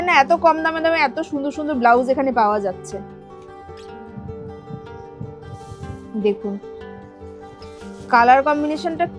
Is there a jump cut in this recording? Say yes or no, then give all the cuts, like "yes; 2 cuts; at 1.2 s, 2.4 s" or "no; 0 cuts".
no; 0 cuts